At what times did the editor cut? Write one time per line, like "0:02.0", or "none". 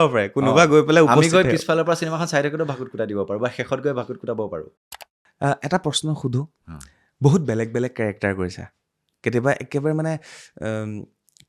0:04.7